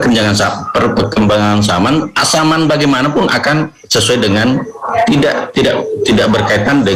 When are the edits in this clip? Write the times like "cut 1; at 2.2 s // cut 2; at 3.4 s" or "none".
none